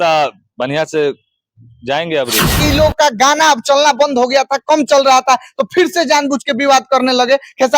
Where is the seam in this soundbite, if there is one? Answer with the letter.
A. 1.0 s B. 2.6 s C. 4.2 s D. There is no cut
B